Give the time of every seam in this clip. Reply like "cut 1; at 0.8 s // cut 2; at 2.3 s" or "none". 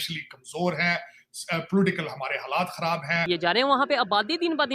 cut 1; at 3.2 s